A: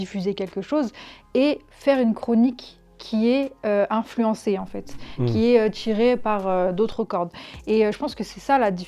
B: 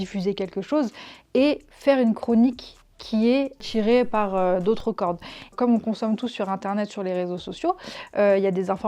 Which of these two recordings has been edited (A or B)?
B